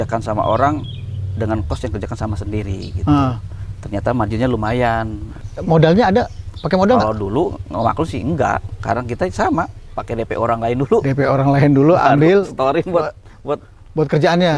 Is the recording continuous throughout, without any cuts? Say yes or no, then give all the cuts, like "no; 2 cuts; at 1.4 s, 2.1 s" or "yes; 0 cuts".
yes; 0 cuts